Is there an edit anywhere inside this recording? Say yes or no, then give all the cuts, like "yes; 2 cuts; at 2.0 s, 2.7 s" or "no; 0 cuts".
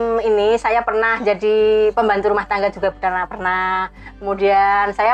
no; 0 cuts